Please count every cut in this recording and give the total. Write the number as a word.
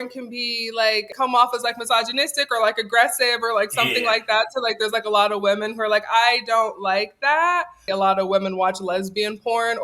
two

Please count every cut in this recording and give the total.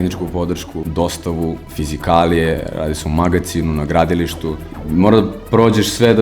three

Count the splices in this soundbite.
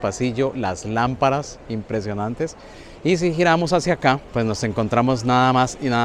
one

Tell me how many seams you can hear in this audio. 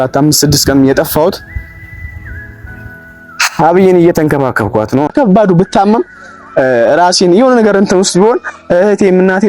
one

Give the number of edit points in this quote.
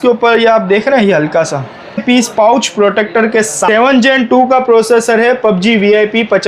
two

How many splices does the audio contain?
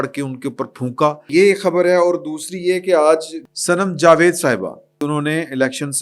two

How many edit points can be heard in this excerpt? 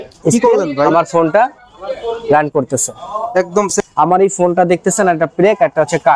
one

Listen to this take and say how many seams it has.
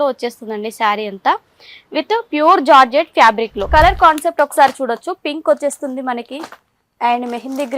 one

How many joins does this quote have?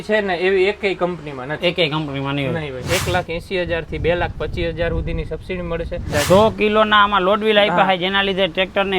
two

